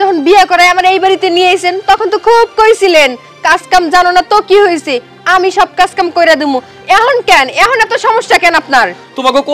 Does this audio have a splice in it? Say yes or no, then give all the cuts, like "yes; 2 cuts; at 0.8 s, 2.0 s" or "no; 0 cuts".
no; 0 cuts